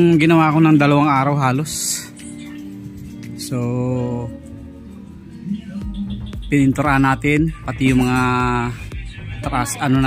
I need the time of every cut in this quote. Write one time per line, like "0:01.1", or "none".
none